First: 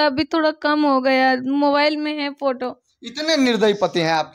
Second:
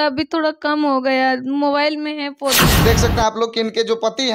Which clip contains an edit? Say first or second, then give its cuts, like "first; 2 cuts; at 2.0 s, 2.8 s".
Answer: second; 1 cut; at 2.7 s